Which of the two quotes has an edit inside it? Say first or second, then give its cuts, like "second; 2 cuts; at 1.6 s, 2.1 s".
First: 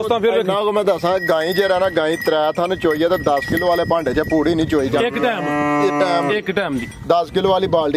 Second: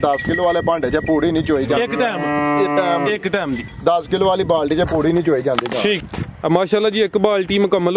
second; 1 cut; at 6.0 s